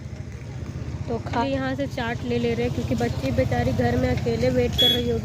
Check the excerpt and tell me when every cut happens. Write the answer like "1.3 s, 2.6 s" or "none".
1.4 s